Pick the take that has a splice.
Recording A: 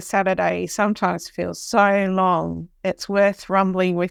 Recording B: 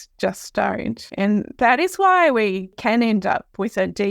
B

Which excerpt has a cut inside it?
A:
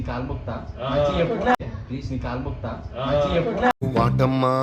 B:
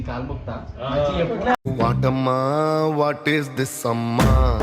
B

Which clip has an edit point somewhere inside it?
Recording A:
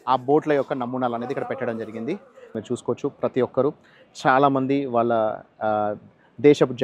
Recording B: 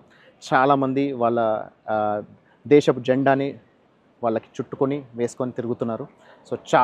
A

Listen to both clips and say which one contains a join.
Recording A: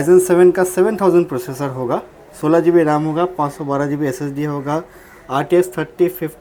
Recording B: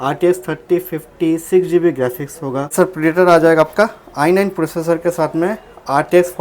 B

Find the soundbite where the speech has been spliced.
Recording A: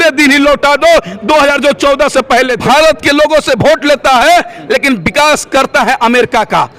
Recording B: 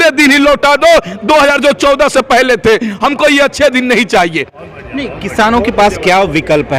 A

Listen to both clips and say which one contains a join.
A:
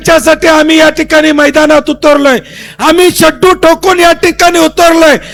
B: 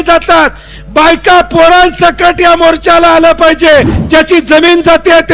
B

